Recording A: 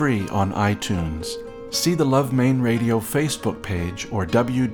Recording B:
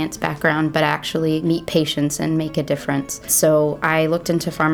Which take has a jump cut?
B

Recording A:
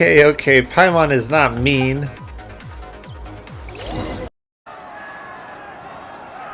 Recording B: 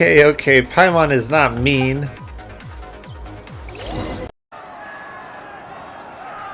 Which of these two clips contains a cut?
B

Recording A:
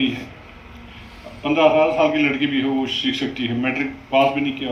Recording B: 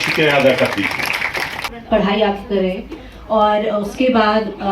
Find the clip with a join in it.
B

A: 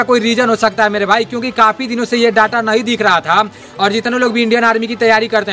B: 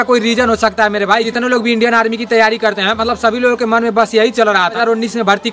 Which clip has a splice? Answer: B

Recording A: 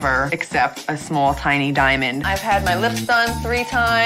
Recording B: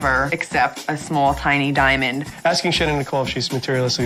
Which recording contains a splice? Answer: A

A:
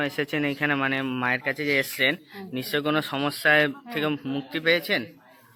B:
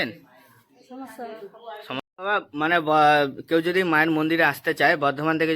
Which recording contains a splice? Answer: B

